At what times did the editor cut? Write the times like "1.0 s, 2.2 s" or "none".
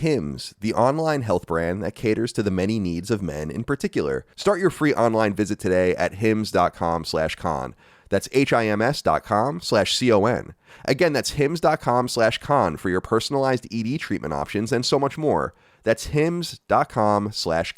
4.3 s